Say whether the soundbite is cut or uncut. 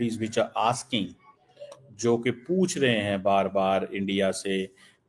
uncut